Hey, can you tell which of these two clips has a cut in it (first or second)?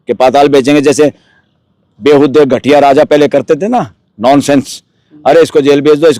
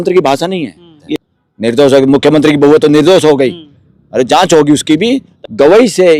second